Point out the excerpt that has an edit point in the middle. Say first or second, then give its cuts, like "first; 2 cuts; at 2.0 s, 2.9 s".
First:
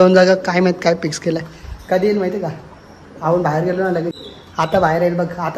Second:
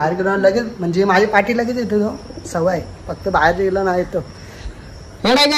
first; 1 cut; at 4.1 s